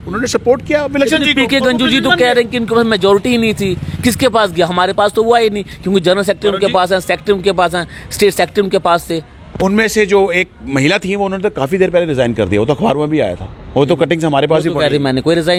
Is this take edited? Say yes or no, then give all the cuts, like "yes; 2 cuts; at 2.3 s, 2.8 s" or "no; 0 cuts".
no; 0 cuts